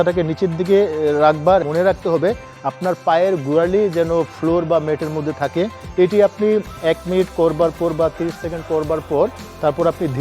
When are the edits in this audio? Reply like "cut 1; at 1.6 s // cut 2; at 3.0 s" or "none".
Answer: cut 1; at 1.6 s